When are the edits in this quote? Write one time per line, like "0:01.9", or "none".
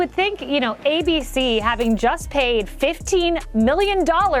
none